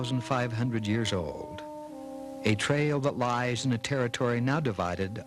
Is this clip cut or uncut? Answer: uncut